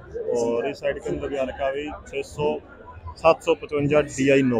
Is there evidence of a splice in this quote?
no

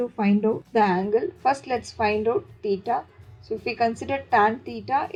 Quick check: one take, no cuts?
yes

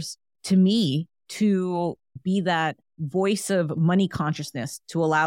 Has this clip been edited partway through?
yes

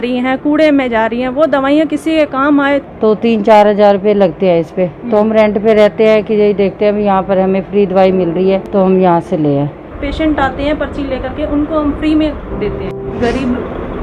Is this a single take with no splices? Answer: no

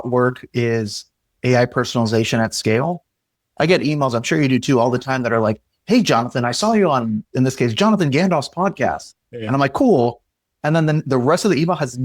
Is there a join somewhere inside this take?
yes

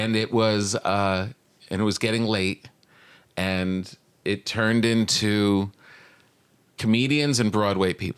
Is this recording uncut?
yes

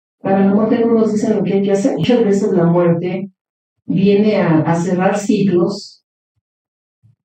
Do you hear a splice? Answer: yes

